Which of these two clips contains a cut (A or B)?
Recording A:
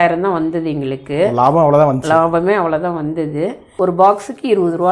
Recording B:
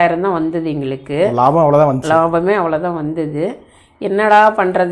A